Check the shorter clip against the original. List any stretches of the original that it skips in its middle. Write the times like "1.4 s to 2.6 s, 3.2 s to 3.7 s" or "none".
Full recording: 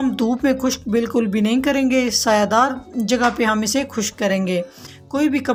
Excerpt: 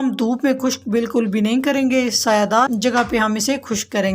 2.7 s to 2.9 s